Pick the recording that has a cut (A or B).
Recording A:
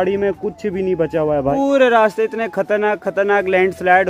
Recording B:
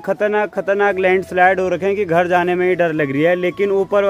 A